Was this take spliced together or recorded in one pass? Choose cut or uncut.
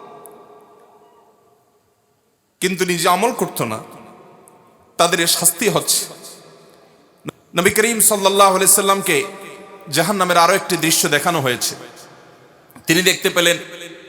cut